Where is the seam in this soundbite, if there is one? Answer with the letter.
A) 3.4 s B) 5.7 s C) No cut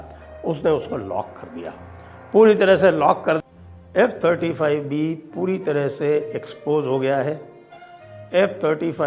A